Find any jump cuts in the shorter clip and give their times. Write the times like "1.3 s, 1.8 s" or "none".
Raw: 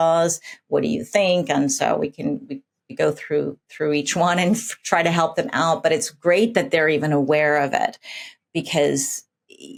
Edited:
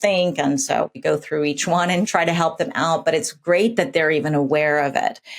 1.0 s, 2.1 s